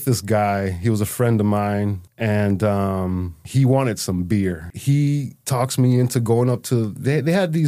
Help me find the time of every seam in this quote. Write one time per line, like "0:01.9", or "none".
0:02.1
0:03.4
0:04.7
0:05.4